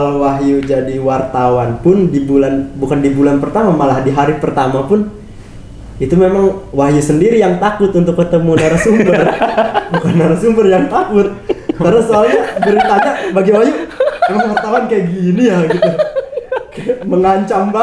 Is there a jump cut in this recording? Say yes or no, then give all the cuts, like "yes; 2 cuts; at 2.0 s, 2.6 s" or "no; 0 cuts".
no; 0 cuts